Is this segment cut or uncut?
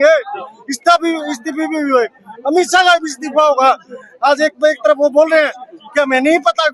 uncut